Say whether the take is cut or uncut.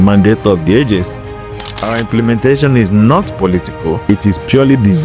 cut